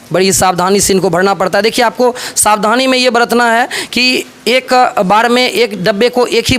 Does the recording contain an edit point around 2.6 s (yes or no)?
no